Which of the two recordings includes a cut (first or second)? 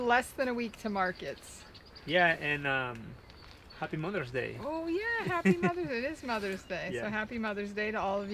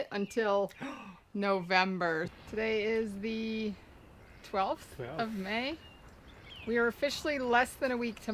second